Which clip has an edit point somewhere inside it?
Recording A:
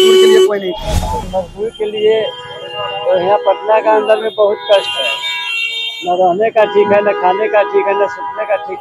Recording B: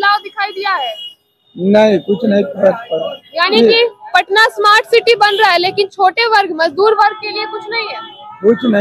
A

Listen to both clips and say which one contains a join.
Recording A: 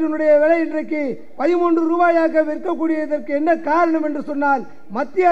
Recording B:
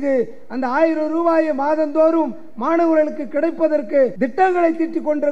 B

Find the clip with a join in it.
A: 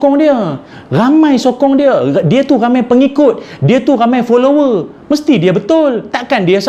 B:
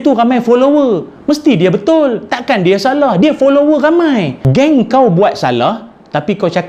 B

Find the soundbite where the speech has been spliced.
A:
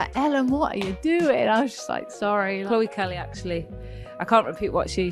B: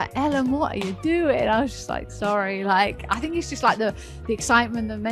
A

